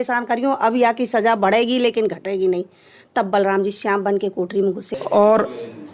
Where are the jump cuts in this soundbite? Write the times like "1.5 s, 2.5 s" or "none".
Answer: 4.9 s